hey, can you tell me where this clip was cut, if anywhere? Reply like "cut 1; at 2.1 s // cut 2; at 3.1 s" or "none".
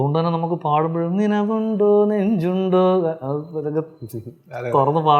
none

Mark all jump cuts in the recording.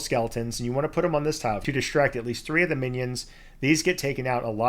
cut 1; at 1.6 s

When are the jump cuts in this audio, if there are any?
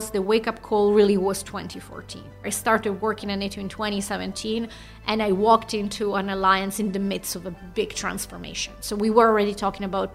cut 1; at 2.4 s

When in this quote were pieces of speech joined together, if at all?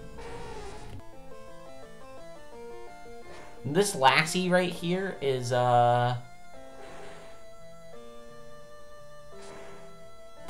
cut 1; at 1.0 s

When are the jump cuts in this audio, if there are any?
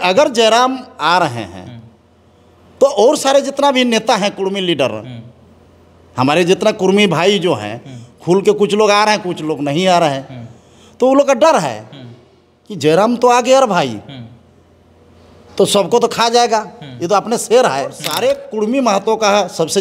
cut 1; at 18.0 s

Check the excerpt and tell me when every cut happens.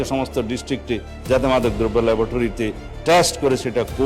none

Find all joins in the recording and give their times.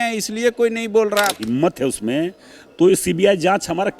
cut 1; at 1.4 s

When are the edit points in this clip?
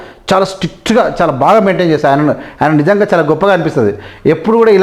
none

